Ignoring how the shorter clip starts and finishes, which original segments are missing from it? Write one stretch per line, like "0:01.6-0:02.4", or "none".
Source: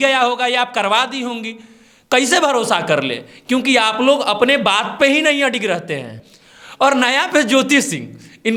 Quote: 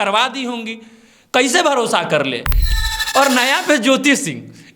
0:03.3-0:06.2